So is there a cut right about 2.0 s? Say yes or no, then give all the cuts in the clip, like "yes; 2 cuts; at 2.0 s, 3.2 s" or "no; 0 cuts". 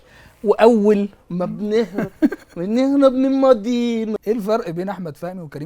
no; 1 cut; at 4.1 s